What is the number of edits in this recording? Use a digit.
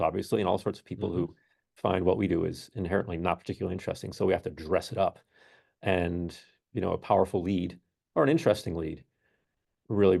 0